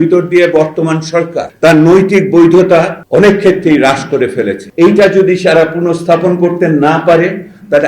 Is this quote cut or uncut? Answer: cut